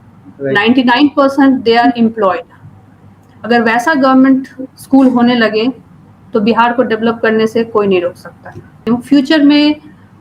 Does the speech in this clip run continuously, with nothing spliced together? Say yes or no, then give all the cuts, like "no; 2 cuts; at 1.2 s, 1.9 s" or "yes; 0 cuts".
no; 1 cut; at 8.7 s